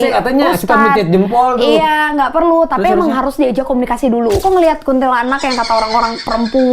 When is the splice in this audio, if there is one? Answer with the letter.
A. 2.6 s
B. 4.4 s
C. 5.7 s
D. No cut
B